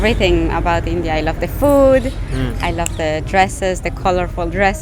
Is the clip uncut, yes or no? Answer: yes